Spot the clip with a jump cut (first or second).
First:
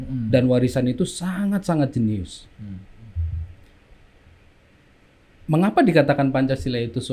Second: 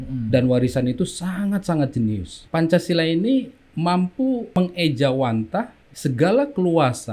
second